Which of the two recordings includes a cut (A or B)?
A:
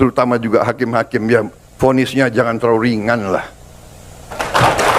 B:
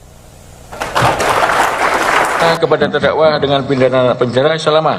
B